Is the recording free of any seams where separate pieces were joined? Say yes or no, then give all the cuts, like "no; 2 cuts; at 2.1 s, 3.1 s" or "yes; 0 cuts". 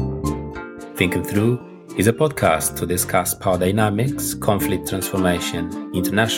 yes; 0 cuts